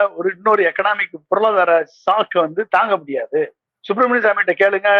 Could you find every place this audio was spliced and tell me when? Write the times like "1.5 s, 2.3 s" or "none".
3.7 s